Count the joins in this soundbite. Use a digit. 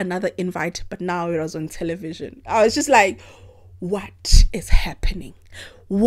0